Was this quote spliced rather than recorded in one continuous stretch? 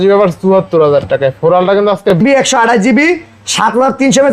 yes; 1 cut; at 2.2 s

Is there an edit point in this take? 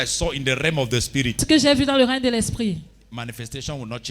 yes; 1 cut; at 1.4 s

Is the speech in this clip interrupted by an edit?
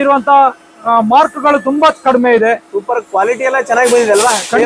no; 0 cuts

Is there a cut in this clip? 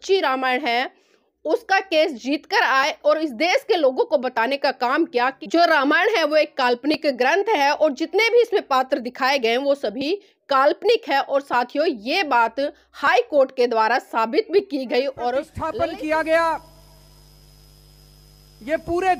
yes; 2 cuts; at 5.4 s, 15.2 s

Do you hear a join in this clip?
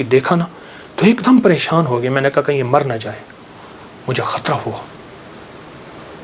no; 0 cuts

